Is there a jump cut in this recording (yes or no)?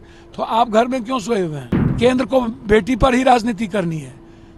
yes